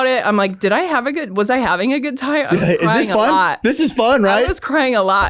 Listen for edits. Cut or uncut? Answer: uncut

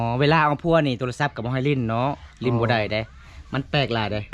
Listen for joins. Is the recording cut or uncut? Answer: uncut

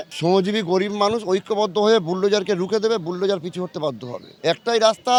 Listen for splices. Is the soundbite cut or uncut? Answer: uncut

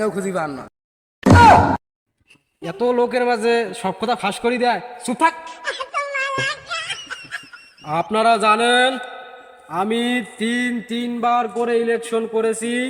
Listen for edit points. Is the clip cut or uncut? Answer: uncut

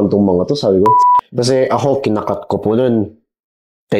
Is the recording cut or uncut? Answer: cut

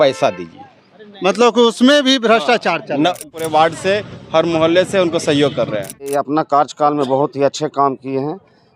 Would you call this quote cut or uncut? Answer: cut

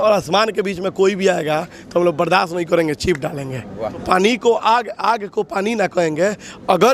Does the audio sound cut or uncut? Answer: cut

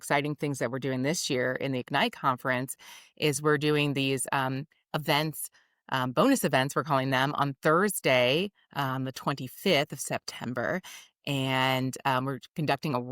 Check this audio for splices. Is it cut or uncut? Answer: uncut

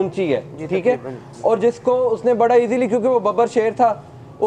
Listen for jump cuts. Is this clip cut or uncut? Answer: uncut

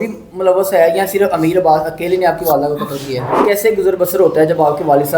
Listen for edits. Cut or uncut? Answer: cut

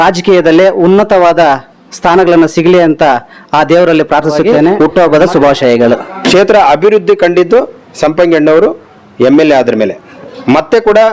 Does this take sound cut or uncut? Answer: cut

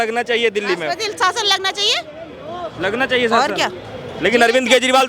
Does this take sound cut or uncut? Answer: uncut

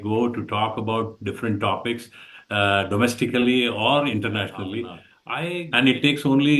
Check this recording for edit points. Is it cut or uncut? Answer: cut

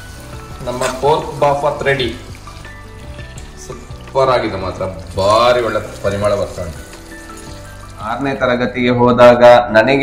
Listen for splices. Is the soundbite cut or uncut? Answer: cut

